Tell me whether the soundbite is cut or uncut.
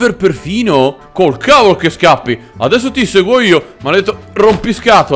cut